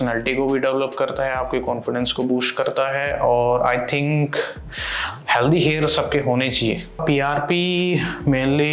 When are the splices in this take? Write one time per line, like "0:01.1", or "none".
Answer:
none